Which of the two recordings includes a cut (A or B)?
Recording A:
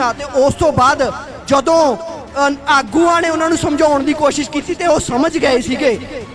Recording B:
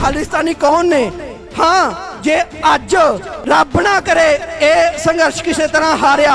B